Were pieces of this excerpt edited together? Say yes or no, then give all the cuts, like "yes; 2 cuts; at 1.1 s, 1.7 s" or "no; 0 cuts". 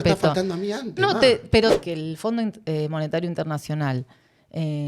yes; 1 cut; at 1.7 s